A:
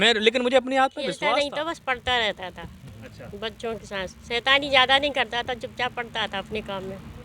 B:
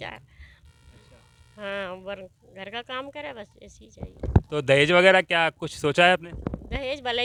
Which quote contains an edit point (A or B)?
A